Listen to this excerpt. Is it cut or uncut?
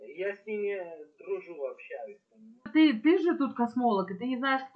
cut